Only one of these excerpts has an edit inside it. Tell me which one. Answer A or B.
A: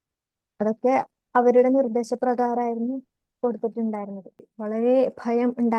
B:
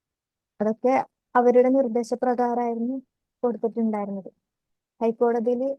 A